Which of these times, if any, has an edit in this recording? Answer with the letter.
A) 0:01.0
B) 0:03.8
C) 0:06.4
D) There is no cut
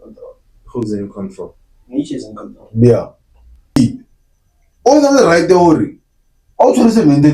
B